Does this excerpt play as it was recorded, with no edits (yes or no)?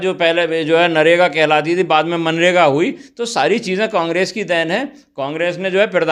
yes